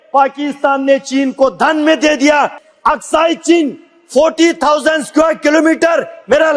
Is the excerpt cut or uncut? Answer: cut